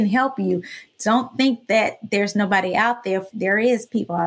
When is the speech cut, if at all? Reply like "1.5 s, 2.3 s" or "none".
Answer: 3.3 s